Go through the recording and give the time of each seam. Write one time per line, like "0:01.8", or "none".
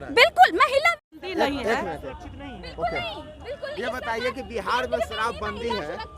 0:00.9